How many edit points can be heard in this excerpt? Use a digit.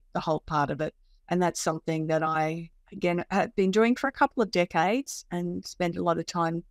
0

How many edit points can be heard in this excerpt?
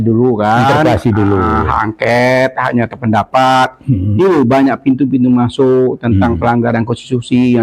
0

